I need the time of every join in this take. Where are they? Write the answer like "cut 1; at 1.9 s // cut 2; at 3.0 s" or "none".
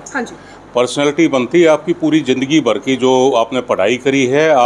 none